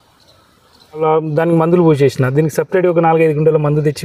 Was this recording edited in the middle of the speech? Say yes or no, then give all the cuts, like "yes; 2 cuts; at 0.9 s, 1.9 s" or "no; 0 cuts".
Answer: yes; 1 cut; at 1.0 s